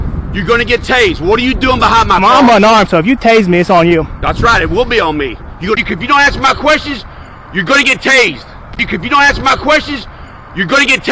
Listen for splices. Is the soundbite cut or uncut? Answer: uncut